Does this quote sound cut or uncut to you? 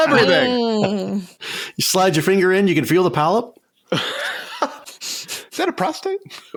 uncut